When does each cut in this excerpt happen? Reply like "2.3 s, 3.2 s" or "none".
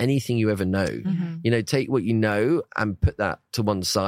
none

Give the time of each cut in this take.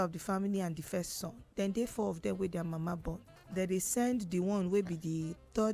1.4 s, 3.4 s

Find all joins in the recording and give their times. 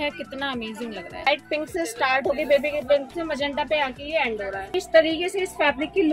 1.3 s, 4.7 s

